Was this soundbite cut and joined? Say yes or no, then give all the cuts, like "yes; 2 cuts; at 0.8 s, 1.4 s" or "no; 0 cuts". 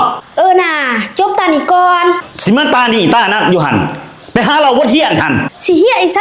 no; 0 cuts